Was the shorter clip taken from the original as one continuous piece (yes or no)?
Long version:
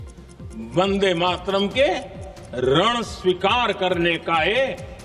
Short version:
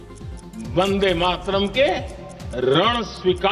yes